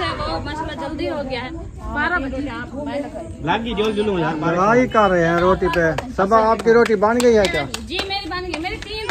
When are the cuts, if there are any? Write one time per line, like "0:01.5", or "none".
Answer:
0:01.5